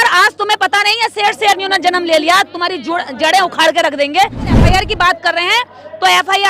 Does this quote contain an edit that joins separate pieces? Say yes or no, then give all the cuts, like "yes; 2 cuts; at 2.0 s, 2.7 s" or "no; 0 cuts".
yes; 1 cut; at 4.6 s